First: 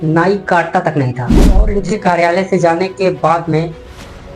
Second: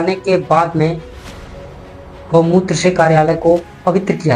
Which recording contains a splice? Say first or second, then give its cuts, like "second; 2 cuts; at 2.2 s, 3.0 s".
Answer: first; 1 cut; at 1.6 s